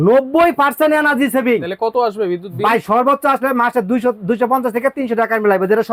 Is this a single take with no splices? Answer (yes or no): yes